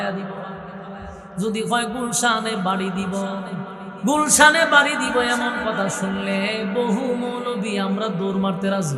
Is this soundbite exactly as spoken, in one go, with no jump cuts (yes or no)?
no